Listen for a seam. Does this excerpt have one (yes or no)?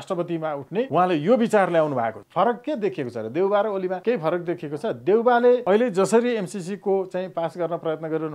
yes